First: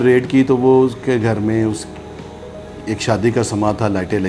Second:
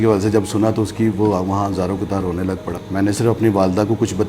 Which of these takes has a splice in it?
second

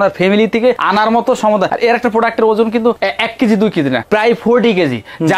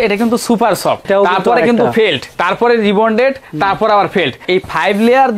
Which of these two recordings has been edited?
second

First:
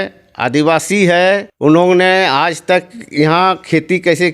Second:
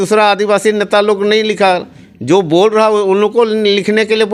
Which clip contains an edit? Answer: first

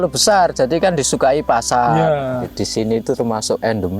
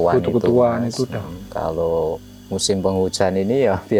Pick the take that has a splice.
first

